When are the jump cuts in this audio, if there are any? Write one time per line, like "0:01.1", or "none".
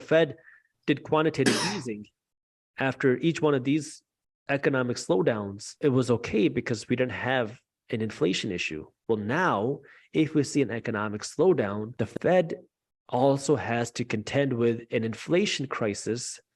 0:05.7
0:11.9

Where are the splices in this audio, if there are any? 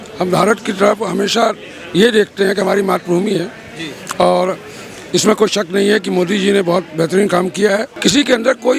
0:07.9

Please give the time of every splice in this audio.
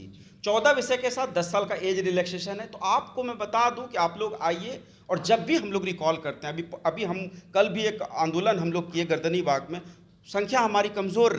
none

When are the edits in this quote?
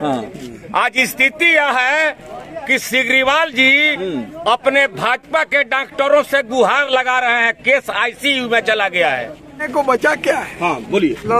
0:09.6

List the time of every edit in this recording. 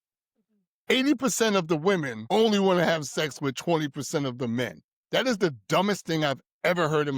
0:02.1

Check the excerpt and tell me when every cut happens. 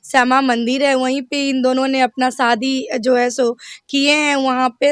none

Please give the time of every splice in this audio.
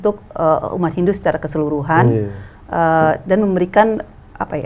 none

